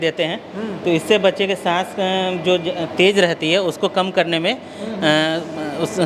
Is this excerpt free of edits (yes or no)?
yes